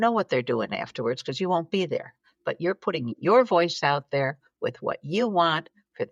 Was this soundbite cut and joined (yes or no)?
no